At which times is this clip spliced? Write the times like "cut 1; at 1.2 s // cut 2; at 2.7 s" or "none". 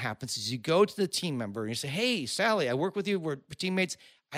none